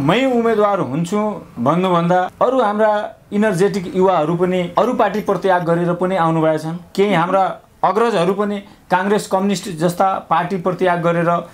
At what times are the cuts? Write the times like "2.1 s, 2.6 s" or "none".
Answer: none